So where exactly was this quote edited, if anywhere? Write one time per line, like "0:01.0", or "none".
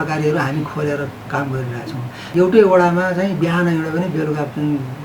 0:02.2